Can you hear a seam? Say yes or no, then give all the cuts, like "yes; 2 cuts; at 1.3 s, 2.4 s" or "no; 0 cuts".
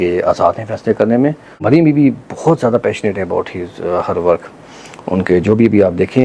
yes; 1 cut; at 1.6 s